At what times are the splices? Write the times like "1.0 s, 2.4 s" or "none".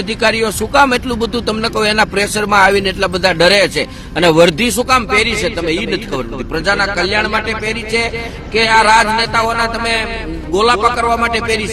none